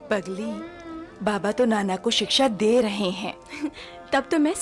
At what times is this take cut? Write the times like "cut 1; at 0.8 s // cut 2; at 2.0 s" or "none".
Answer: none